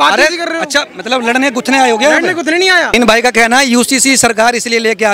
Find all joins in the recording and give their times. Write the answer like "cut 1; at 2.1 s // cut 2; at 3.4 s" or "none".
cut 1; at 2.9 s